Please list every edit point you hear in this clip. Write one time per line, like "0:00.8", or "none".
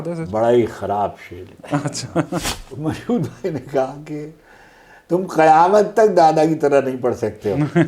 0:02.6